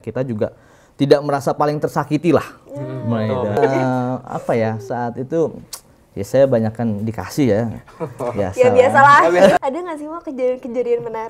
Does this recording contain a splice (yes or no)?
yes